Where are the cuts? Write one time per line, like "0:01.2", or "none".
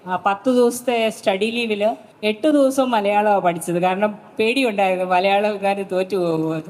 0:02.1